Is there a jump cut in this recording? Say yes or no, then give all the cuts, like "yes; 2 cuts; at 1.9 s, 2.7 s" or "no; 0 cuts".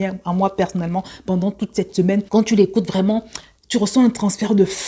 yes; 1 cut; at 2.3 s